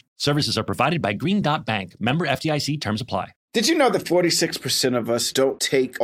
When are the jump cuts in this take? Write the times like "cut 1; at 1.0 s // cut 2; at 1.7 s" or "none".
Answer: cut 1; at 3.4 s